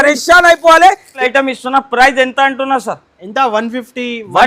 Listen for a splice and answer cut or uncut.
cut